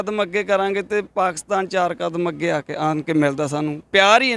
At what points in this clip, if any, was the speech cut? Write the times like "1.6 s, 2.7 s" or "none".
none